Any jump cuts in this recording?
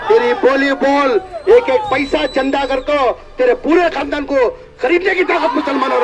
no; 0 cuts

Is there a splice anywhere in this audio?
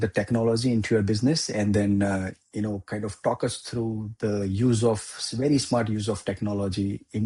no; 0 cuts

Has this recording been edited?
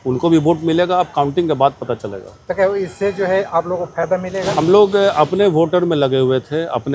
no; 0 cuts

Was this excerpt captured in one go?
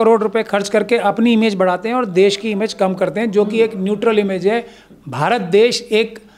yes; 0 cuts

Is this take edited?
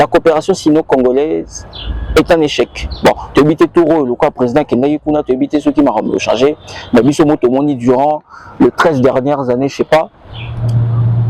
no; 0 cuts

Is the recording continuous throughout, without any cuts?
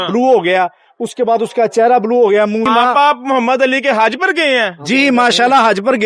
no; 1 cut; at 2.7 s

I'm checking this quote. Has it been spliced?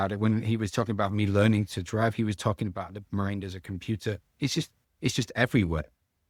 no; 0 cuts

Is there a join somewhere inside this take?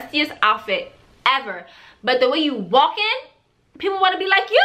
no; 0 cuts

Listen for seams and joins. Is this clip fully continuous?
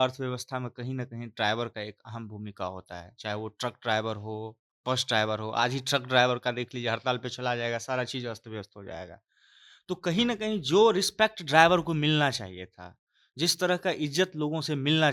yes; 0 cuts

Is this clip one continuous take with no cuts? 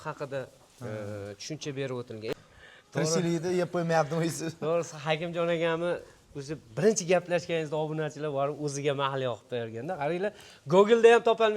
no; 1 cut; at 2.3 s

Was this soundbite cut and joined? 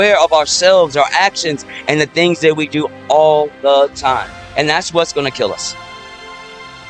yes; 1 cut; at 5.6 s

